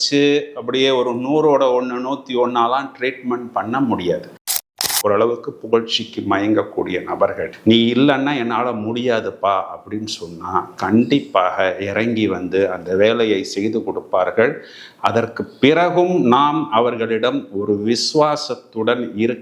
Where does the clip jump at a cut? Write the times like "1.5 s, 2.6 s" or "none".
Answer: 4.6 s